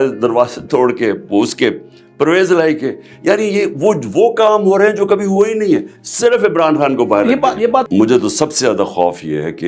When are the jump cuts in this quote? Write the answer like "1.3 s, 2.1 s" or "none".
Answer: 7.9 s